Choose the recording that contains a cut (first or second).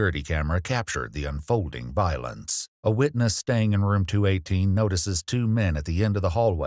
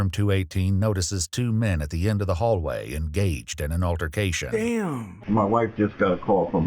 second